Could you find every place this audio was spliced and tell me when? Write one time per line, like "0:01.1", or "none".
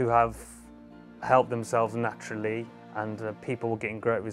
0:02.7